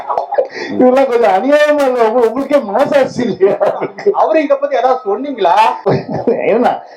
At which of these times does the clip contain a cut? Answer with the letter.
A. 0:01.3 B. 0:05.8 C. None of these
B